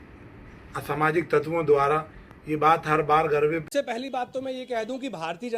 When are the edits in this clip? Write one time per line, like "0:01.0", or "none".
0:04.0